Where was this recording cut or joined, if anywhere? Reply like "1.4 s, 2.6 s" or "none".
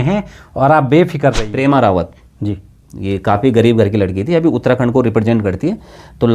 1.5 s